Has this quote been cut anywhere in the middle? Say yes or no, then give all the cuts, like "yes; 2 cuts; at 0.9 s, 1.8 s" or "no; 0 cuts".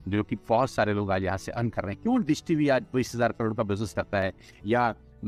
no; 0 cuts